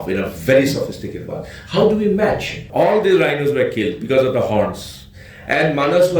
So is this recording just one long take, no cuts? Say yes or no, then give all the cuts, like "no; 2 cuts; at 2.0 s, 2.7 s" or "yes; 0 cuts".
no; 1 cut; at 2.6 s